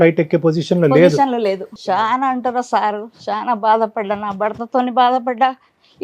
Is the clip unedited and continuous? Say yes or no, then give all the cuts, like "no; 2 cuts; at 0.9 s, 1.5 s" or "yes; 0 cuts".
no; 1 cut; at 1.7 s